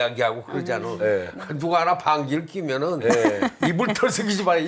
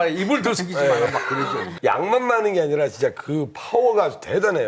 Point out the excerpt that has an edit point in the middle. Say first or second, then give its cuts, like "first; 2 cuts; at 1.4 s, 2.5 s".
second; 1 cut; at 1.7 s